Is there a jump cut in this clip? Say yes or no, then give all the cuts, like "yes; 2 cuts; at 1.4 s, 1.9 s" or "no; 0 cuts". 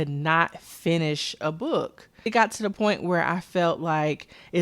yes; 1 cut; at 2.2 s